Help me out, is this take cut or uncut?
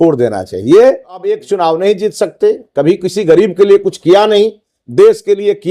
cut